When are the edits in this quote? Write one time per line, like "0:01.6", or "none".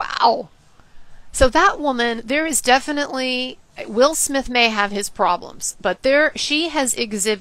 none